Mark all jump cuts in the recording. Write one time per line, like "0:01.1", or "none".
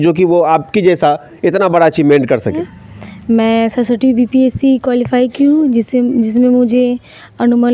0:02.6